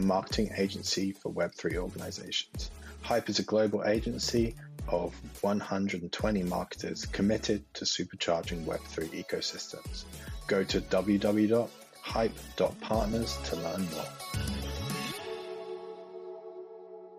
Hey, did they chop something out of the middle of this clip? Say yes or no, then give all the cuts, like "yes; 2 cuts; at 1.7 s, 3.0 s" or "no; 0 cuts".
yes; 1 cut; at 14.1 s